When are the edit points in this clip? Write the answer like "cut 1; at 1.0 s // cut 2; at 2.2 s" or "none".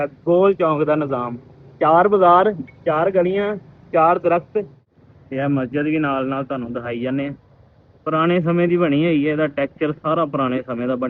cut 1; at 4.8 s

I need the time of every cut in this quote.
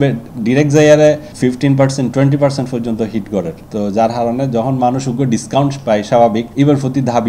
cut 1; at 1.3 s // cut 2; at 3.6 s // cut 3; at 6.5 s

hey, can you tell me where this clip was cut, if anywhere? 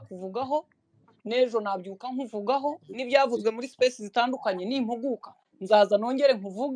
none

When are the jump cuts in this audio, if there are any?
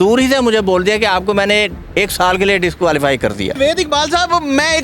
cut 1; at 3.6 s

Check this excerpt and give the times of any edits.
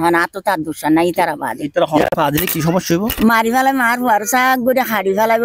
cut 1; at 2.0 s

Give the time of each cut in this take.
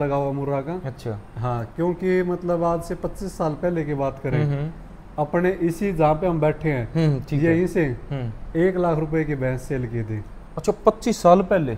none

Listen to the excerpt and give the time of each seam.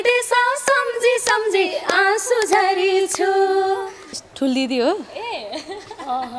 cut 1; at 4.1 s

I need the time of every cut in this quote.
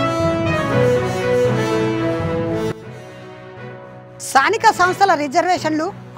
cut 1; at 4.1 s

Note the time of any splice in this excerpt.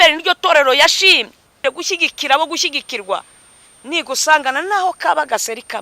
cut 1; at 1.6 s

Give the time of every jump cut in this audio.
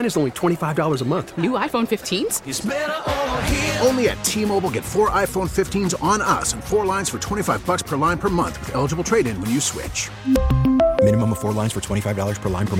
none

